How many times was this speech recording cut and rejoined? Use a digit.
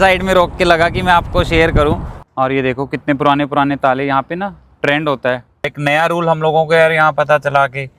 2